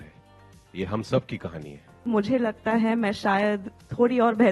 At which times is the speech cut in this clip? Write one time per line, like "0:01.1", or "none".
0:02.1

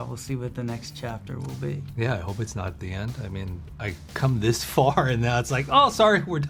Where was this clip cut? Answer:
none

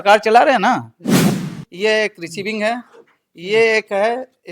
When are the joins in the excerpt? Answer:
0:01.2

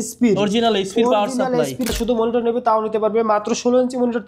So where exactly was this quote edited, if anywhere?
0:01.9

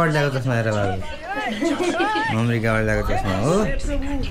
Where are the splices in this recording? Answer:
none

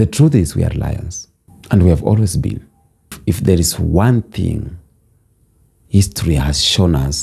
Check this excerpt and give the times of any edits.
0:03.2

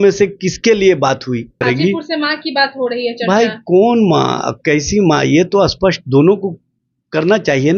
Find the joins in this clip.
0:01.6

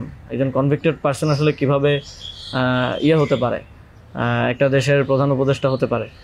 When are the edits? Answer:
none

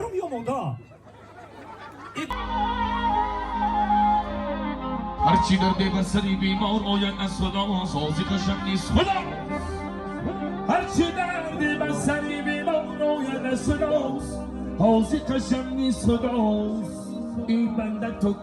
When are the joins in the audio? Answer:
0:02.3

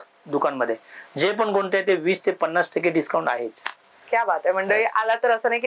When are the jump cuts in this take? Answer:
none

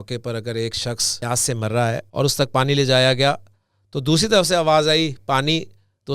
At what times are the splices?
0:01.1
0:02.1

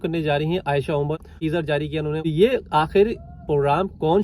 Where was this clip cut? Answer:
0:01.3
0:02.3

